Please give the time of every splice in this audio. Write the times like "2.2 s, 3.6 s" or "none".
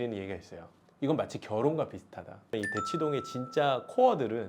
2.5 s

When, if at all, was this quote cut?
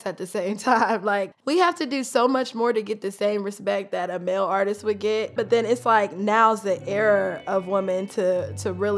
1.3 s

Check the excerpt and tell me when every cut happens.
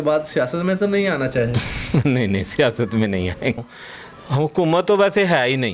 3.6 s

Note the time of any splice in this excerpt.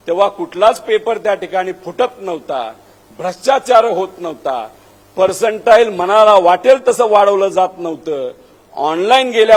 none

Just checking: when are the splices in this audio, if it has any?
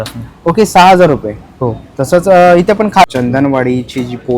3.1 s

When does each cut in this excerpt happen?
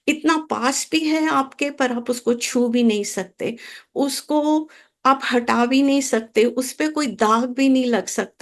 none

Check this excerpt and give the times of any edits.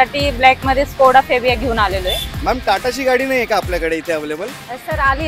2.3 s

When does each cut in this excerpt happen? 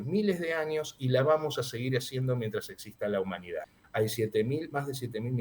3.8 s

